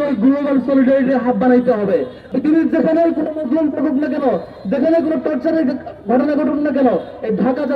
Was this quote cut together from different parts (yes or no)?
yes